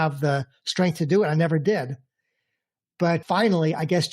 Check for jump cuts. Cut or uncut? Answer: cut